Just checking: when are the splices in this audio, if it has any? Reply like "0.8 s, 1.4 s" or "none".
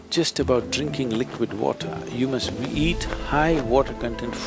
none